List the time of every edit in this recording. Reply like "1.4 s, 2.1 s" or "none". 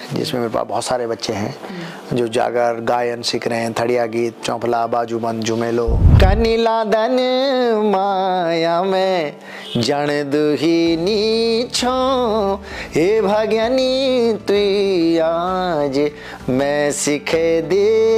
6.0 s